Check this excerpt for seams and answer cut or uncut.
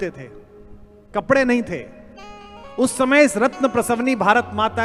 uncut